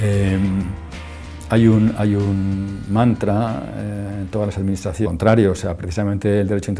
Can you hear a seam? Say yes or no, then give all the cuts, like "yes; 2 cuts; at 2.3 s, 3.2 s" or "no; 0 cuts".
no; 0 cuts